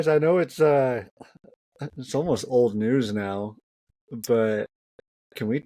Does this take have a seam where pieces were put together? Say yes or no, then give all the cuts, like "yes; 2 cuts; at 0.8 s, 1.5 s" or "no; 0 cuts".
no; 0 cuts